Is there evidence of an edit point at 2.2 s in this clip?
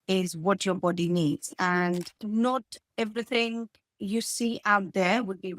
yes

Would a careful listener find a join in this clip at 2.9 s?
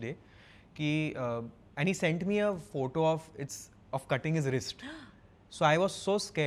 no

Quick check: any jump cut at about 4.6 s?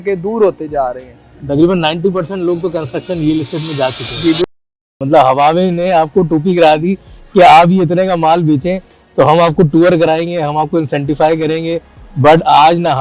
yes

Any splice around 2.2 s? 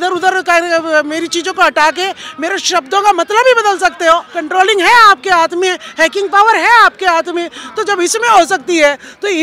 no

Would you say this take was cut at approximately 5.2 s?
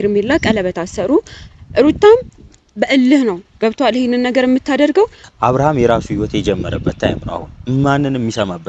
yes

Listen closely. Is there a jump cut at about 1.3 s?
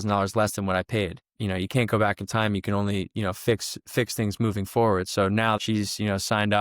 yes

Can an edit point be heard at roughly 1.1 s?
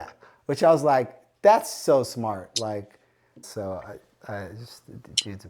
no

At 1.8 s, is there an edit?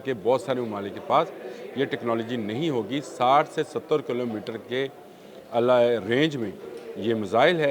no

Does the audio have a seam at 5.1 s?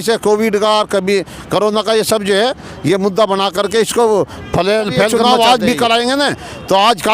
yes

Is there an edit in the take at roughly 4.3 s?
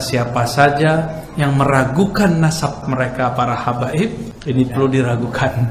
yes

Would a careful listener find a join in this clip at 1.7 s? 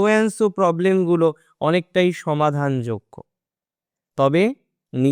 no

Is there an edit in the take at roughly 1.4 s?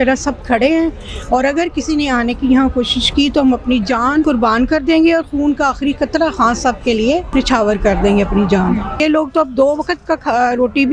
no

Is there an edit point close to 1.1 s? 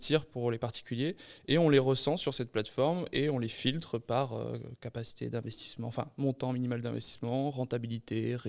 no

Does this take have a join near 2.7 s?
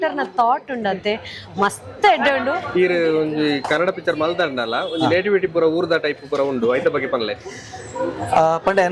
yes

